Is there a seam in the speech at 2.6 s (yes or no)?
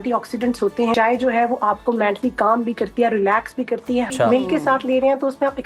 no